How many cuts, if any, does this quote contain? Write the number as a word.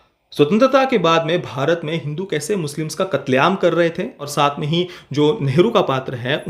one